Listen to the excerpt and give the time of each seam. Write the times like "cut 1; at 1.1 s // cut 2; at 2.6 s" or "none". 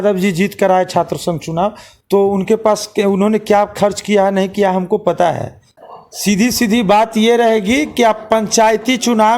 cut 1; at 5.7 s